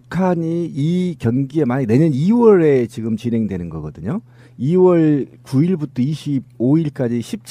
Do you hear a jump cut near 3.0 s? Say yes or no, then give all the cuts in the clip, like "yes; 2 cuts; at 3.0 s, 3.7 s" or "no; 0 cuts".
yes; 1 cut; at 3.0 s